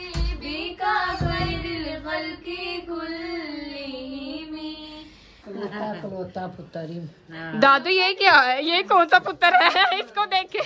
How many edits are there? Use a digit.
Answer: 1